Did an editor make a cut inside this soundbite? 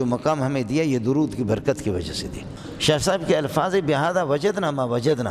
yes; 1 cut; at 3.0 s

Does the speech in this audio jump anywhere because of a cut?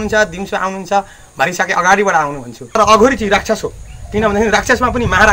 yes; 1 cut; at 2.7 s

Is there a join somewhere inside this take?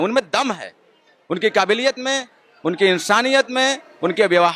no; 0 cuts

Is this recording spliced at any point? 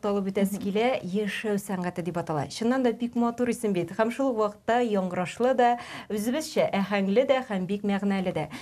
no; 0 cuts

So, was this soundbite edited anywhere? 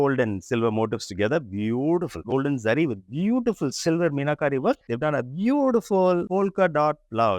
yes; 2 cuts; at 2.2 s, 4.9 s

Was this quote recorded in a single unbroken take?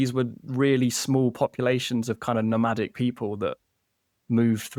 yes; 0 cuts

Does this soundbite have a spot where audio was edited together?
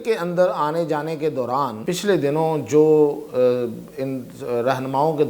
yes; 1 cut; at 1.8 s

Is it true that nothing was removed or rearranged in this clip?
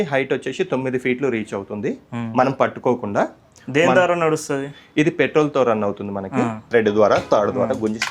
no; 1 cut; at 6.7 s

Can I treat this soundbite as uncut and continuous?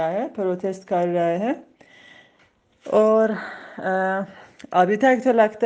yes; 0 cuts

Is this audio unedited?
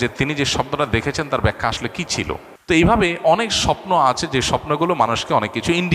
no; 1 cut; at 2.5 s

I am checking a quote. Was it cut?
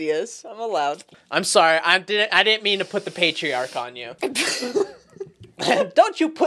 yes; 2 cuts; at 1.1 s, 4.0 s

